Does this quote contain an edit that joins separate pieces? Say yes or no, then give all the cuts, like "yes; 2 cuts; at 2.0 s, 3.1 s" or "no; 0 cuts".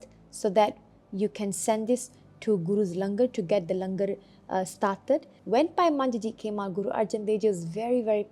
yes; 1 cut; at 5.3 s